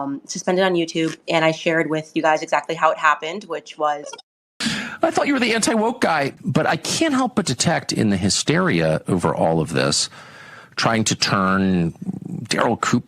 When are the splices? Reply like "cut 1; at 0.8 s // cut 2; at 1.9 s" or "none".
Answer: cut 1; at 4.5 s // cut 2; at 6.3 s